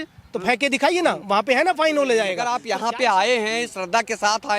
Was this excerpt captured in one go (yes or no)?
no